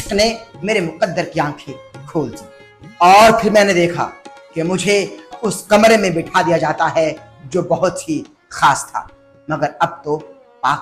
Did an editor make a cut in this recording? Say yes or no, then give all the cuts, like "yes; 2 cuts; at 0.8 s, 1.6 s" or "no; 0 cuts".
yes; 1 cut; at 5.3 s